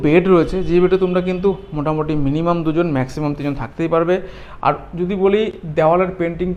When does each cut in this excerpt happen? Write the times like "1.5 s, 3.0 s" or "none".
none